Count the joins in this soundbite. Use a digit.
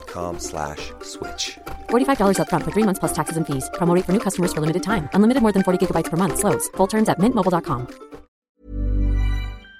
1